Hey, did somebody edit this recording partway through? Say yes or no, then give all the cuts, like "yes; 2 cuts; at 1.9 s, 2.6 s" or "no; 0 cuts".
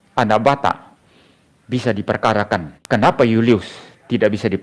yes; 1 cut; at 2.7 s